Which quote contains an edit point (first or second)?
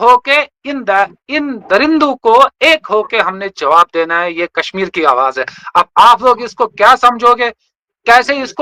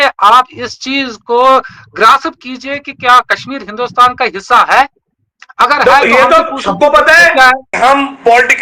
second